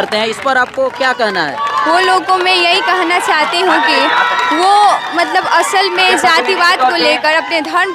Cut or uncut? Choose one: uncut